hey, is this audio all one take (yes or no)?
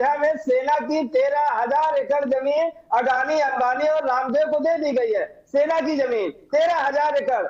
yes